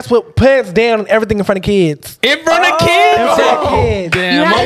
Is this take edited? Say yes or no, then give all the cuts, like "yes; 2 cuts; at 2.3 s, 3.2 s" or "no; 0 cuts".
yes; 1 cut; at 2.1 s